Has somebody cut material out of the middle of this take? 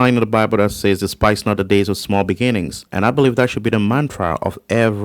yes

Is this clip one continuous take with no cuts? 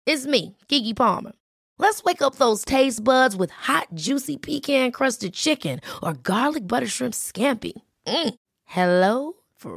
yes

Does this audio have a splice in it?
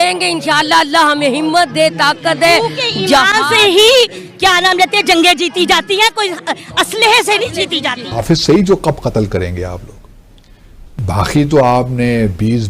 yes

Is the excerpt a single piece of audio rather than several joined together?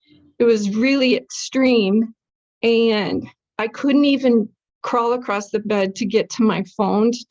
yes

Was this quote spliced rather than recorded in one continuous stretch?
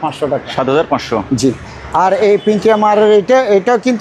no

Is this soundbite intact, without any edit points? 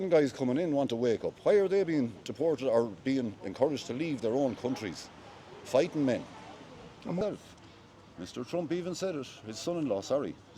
yes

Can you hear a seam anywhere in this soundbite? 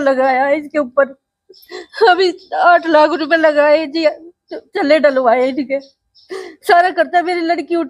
no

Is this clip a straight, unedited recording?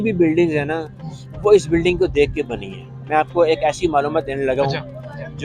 yes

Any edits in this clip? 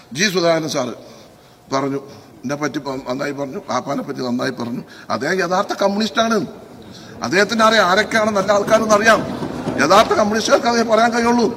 no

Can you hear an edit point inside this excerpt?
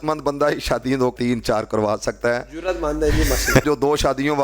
yes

